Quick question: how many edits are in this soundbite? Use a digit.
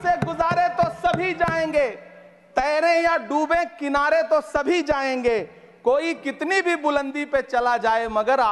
0